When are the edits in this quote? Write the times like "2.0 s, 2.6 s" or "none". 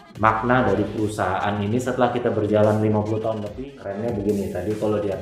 3.4 s